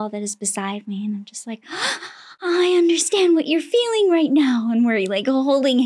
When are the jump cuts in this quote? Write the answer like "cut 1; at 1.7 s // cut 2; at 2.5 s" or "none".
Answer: none